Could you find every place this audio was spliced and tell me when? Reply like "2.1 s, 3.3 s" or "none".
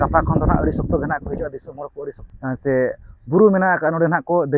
2.2 s